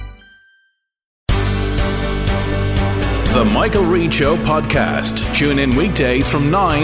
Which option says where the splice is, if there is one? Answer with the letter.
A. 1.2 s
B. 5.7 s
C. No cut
A